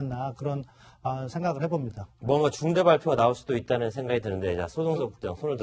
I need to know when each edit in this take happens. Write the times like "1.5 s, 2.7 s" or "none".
2.6 s